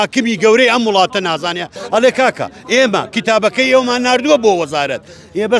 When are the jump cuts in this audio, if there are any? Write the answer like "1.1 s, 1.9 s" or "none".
1.8 s